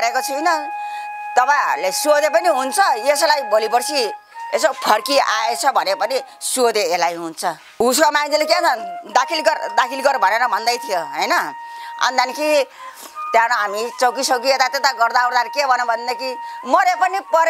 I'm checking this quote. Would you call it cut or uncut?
cut